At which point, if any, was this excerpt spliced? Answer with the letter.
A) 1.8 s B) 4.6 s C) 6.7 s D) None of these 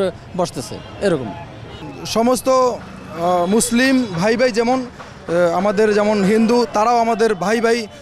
A